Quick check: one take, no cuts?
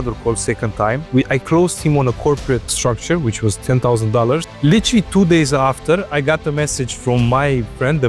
no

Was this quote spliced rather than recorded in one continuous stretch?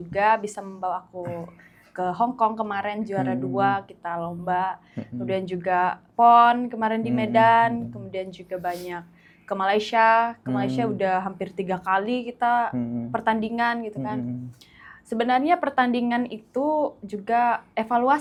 no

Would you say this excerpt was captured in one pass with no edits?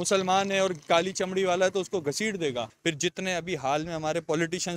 no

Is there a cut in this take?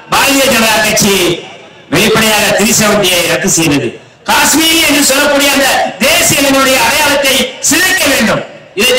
no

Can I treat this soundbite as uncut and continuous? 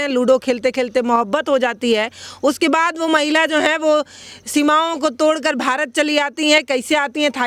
yes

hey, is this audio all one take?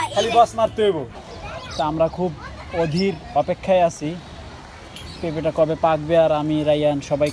no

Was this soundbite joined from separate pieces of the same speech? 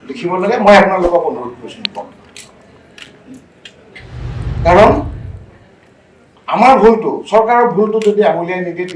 no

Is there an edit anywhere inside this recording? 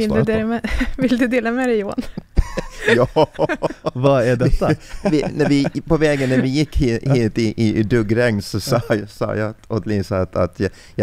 no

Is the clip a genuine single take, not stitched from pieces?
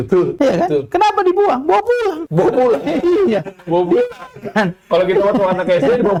yes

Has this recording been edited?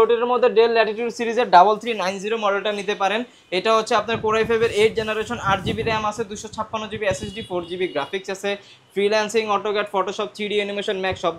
no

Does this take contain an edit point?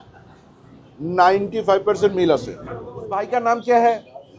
yes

